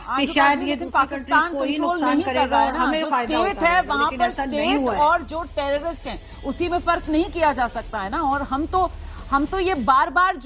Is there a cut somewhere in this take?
no; 0 cuts

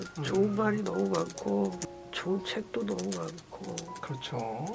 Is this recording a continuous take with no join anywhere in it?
no; 1 cut; at 1.8 s

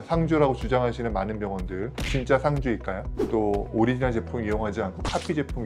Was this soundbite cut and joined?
yes; 1 cut; at 3.1 s

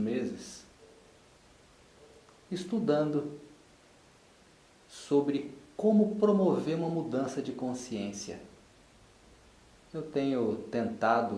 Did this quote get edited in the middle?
yes; 1 cut; at 8.7 s

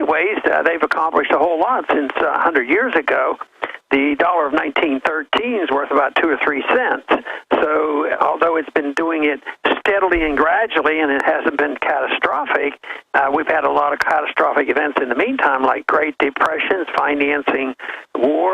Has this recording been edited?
yes; 1 cut; at 12.9 s

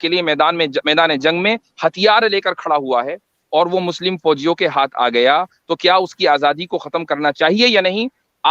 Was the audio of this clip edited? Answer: no; 0 cuts

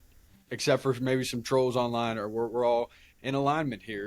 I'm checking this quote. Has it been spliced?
no; 0 cuts

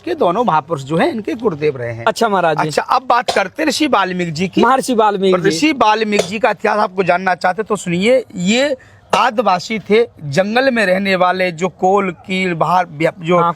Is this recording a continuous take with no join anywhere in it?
yes; 0 cuts

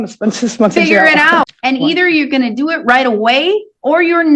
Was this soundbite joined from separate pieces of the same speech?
yes; 1 cut; at 1.4 s

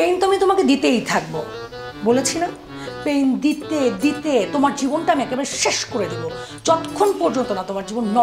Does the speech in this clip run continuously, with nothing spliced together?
yes; 0 cuts

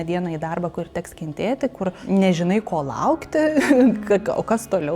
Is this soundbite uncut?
no; 1 cut; at 2.0 s

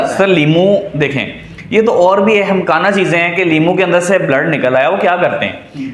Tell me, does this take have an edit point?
no; 0 cuts

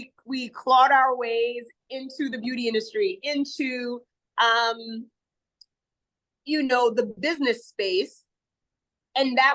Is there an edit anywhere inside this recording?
no; 0 cuts

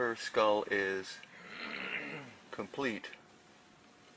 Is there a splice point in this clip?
no; 0 cuts

